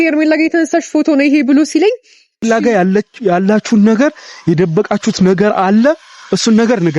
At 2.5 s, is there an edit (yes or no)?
yes